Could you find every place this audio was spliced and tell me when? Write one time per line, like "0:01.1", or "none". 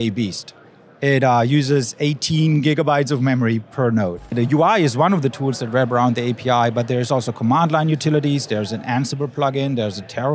0:04.3